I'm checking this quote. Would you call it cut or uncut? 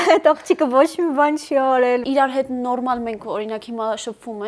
cut